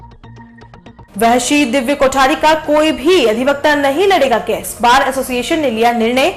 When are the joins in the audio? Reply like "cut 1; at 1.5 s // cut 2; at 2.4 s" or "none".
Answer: cut 1; at 1.0 s